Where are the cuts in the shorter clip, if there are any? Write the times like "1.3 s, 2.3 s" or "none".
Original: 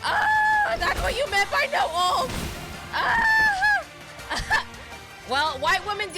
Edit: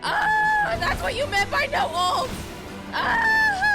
none